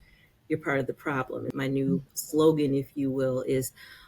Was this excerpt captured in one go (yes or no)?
no